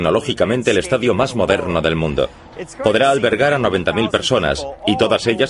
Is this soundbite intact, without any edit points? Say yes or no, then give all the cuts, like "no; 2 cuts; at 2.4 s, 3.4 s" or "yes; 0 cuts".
no; 1 cut; at 2.3 s